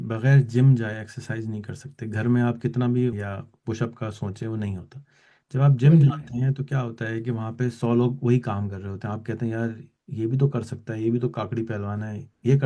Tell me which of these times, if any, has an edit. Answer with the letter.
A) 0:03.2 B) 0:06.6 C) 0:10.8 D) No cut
A